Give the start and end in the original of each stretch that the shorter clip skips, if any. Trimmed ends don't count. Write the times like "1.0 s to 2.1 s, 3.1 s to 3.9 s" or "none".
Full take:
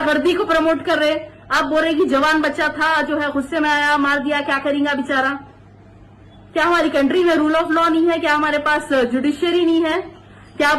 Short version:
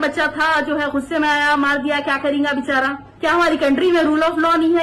5.5 s to 6.4 s

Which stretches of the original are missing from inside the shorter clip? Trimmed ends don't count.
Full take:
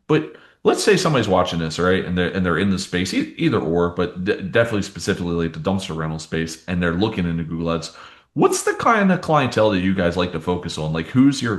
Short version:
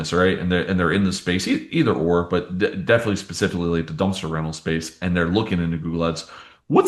none

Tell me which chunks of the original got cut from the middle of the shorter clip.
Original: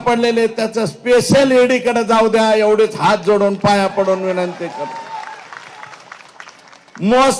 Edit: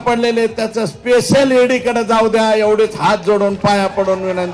none

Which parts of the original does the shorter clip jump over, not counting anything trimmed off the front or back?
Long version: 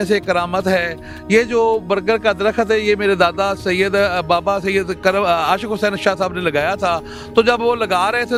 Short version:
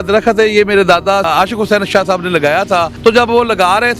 3.6 s to 5.4 s, 7.0 s to 7.2 s

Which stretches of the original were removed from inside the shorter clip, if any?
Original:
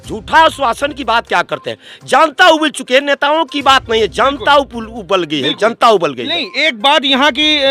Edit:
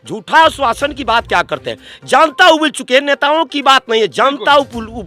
none

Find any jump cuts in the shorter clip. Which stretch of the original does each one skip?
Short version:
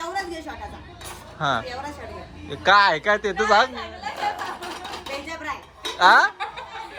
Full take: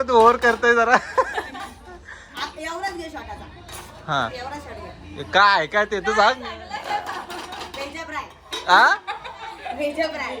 none

